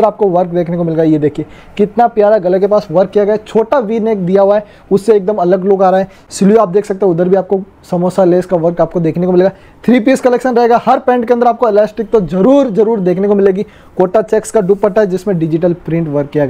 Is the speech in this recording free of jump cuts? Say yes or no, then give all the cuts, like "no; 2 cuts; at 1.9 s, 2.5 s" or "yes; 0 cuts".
yes; 0 cuts